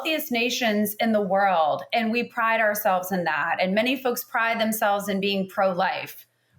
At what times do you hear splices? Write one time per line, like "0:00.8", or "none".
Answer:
none